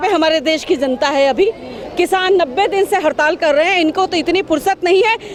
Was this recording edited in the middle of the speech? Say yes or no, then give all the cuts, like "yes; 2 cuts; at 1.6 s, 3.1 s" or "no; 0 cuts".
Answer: no; 0 cuts